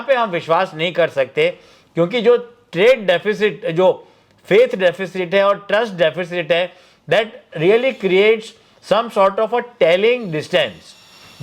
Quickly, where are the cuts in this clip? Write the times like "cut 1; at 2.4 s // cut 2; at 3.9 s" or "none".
none